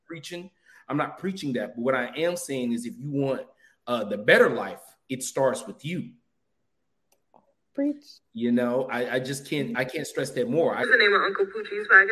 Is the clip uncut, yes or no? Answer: no